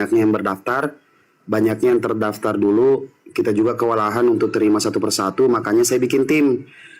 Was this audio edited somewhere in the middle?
no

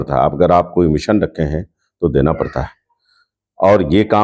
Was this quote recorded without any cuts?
yes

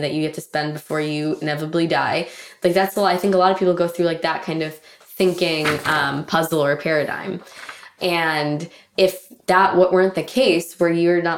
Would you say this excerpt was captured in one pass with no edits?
yes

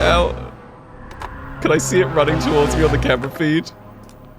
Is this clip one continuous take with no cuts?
no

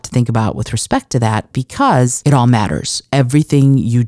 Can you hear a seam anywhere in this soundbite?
yes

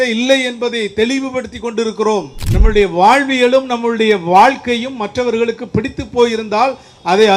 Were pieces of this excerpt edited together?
yes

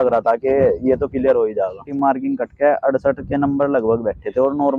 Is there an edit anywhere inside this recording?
yes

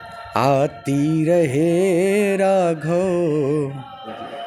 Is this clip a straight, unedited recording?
yes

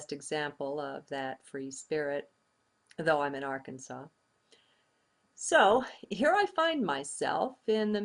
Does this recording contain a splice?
no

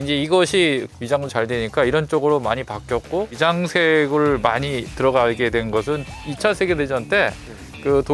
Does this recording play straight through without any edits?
yes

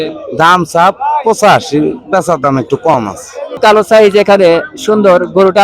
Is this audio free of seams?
no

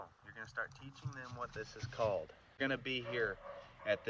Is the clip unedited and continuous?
no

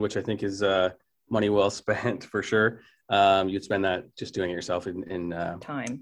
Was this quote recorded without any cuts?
yes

